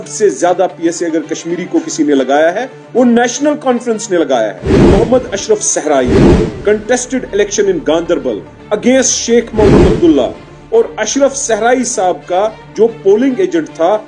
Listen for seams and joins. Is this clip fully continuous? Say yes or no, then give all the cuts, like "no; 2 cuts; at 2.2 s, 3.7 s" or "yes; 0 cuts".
no; 1 cut; at 4.8 s